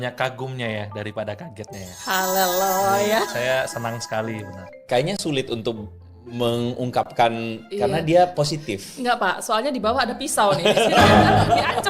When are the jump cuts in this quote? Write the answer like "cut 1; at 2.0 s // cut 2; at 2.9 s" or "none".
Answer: cut 1; at 4.8 s